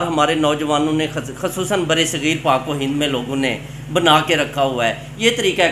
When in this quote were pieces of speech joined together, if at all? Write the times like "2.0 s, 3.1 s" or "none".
none